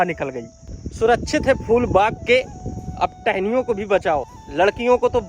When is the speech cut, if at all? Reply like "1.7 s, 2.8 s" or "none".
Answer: 4.4 s